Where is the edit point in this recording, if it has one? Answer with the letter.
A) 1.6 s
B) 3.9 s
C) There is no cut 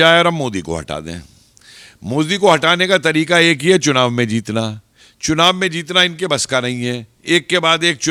C